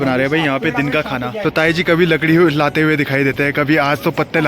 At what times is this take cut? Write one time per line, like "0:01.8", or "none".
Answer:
0:01.3